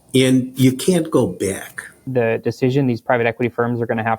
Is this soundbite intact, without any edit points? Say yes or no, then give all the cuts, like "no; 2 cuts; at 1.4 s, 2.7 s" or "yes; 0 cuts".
no; 1 cut; at 2.0 s